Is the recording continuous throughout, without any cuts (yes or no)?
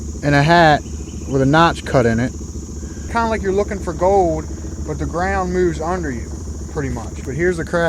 no